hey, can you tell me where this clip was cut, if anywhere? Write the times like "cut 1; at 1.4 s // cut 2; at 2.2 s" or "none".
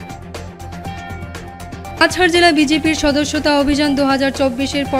cut 1; at 2.0 s